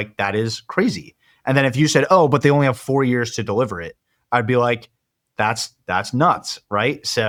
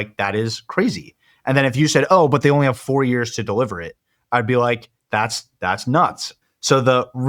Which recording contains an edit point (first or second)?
second